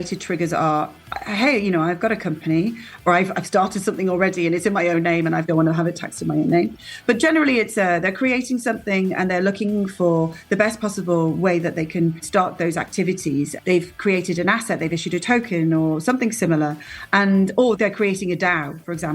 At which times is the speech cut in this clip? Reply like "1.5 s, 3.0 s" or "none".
3.0 s, 5.5 s, 12.2 s, 13.5 s, 17.8 s